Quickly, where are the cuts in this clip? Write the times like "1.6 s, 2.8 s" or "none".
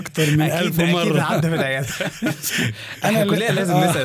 2.9 s